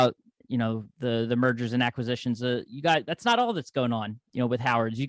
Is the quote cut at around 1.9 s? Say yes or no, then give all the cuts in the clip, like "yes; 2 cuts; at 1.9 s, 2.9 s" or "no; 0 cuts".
no; 1 cut; at 4.2 s